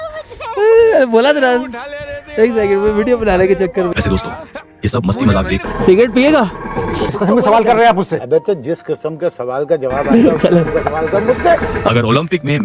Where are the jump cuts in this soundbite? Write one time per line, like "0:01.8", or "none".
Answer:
0:05.6
0:07.1
0:11.9

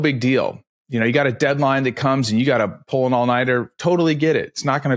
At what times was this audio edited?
none

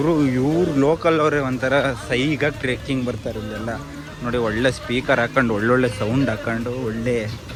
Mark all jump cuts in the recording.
none

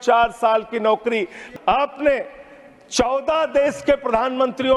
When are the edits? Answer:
0:01.4

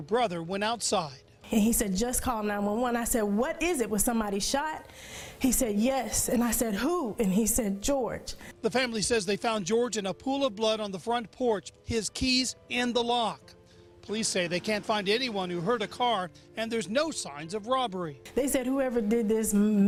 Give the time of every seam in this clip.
none

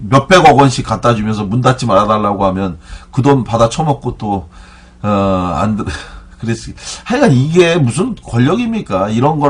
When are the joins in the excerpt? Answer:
0:01.3

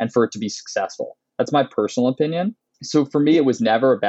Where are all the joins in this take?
none

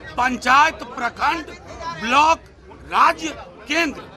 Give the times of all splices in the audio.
none

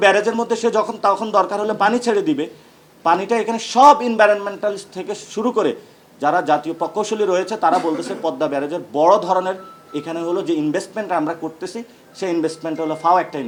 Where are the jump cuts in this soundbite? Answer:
none

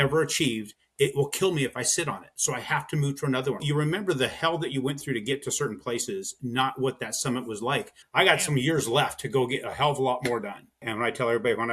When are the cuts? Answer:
0:03.6
0:08.0
0:10.9

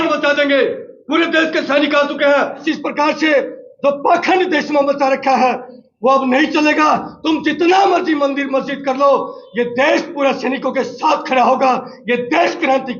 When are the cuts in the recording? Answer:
0:02.6

